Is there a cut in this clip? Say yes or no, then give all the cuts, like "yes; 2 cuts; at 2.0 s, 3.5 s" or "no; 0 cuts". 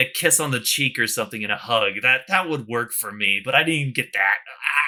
no; 0 cuts